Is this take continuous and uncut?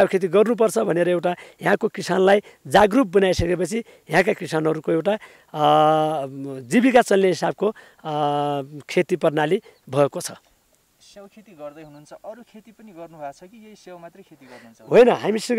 yes; 0 cuts

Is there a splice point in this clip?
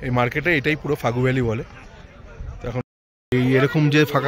yes; 1 cut; at 2.8 s

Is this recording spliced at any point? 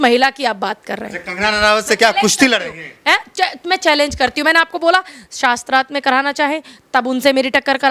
no; 0 cuts

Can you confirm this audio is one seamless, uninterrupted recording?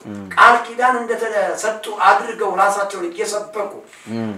yes; 0 cuts

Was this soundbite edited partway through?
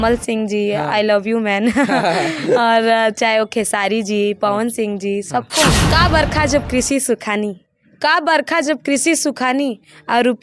yes; 1 cut; at 5.8 s

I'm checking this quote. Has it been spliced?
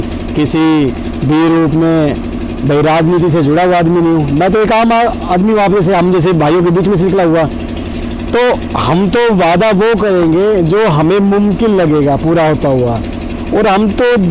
no; 0 cuts

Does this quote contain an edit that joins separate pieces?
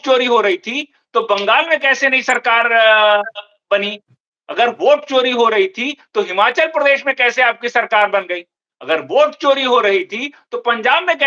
no; 0 cuts

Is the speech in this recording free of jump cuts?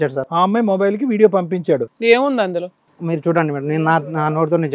no; 1 cut; at 1.9 s

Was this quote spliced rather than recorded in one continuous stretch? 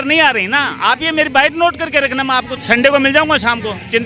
yes; 1 cut; at 2.5 s

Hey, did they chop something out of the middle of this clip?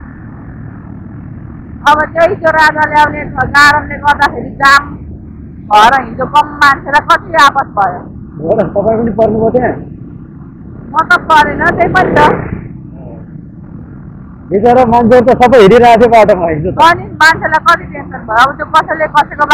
no; 0 cuts

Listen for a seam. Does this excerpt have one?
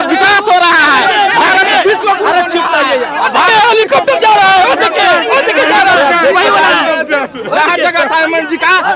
no; 0 cuts

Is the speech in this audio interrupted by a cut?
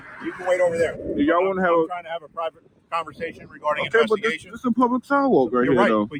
no; 0 cuts

